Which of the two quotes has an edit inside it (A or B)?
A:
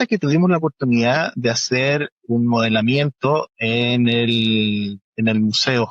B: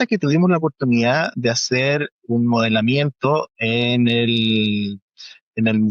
A